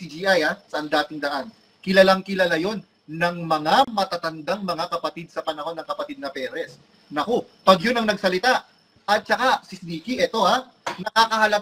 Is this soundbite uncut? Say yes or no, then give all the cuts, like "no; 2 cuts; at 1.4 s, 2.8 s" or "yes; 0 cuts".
yes; 0 cuts